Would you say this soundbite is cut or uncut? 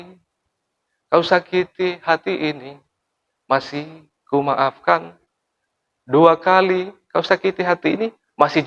uncut